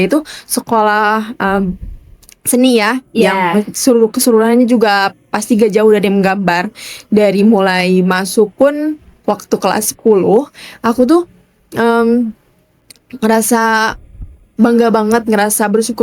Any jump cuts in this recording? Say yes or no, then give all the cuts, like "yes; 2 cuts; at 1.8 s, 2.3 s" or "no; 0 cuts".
no; 0 cuts